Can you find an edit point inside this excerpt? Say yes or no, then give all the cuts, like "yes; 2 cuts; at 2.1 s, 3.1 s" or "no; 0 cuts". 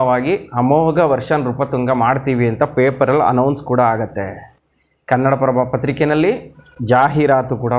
no; 0 cuts